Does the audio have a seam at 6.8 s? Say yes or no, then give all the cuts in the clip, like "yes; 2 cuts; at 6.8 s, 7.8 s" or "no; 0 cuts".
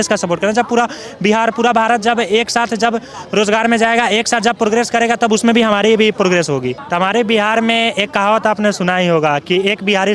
yes; 1 cut; at 6.8 s